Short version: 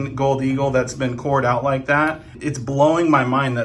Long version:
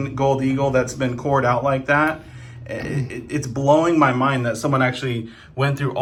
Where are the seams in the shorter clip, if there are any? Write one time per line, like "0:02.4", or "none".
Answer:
0:02.3